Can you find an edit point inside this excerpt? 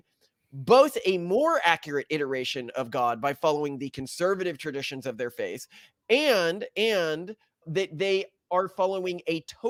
no; 0 cuts

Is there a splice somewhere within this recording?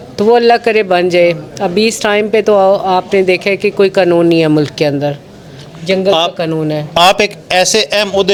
no; 0 cuts

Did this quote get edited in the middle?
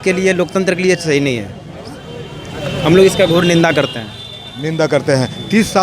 no; 0 cuts

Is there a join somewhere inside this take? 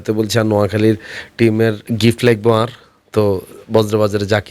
yes; 1 cut; at 1.9 s

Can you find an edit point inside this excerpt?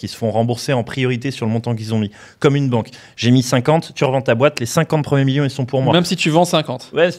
no; 0 cuts

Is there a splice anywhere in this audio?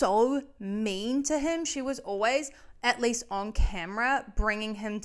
no; 0 cuts

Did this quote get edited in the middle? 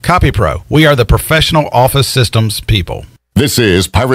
yes; 1 cut; at 3.1 s

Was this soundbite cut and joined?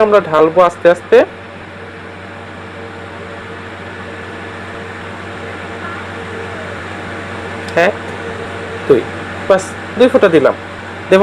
no; 0 cuts

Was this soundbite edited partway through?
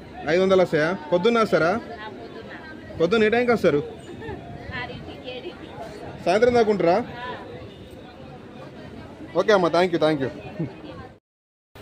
no; 0 cuts

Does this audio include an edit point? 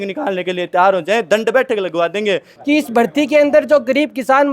yes; 1 cut; at 2.5 s

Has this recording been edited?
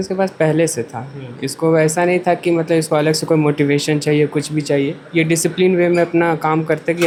no; 0 cuts

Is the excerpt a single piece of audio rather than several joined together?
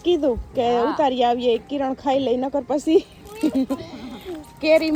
yes; 0 cuts

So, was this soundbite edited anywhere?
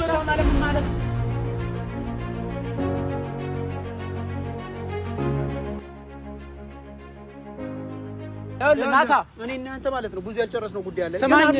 no; 0 cuts

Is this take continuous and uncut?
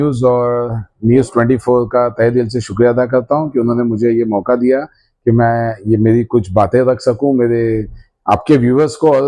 yes; 0 cuts

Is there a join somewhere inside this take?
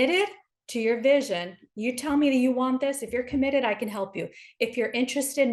no; 0 cuts

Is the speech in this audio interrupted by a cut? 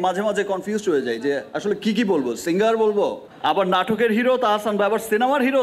yes; 1 cut; at 3.3 s

